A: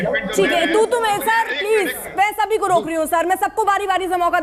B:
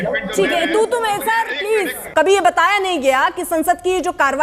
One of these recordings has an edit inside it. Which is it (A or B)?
B